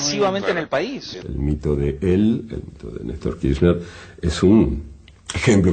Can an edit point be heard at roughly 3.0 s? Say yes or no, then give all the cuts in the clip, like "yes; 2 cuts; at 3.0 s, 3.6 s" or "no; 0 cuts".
no; 1 cut; at 1.1 s